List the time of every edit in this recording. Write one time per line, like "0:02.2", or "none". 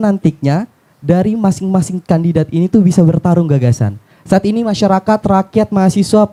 none

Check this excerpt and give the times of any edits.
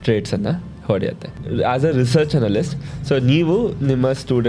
0:01.3

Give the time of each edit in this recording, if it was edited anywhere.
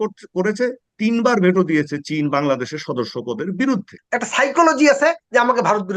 0:04.0

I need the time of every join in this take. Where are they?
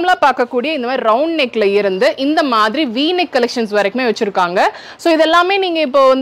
none

